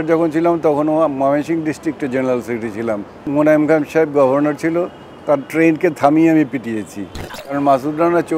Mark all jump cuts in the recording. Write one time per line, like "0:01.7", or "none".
0:03.2
0:07.6